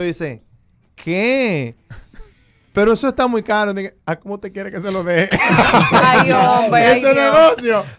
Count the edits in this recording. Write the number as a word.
zero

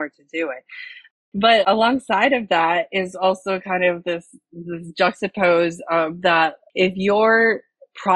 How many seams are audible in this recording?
one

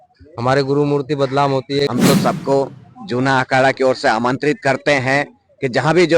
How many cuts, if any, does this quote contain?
one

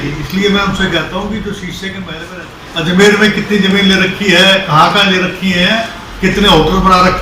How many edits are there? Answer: one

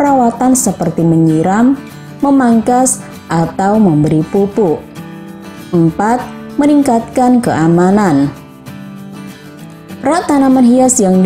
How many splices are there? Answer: two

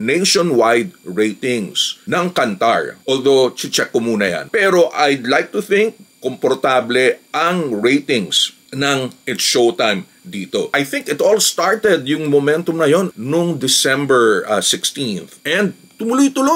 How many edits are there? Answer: zero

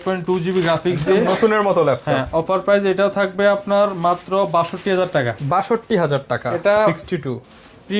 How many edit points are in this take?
zero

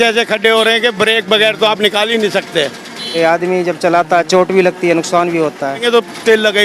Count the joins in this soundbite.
two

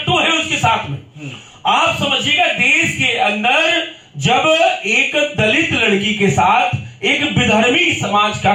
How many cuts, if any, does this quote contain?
zero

